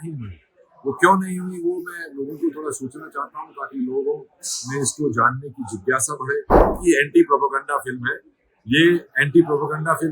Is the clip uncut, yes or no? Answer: no